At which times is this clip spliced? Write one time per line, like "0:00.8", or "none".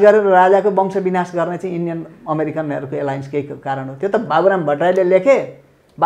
none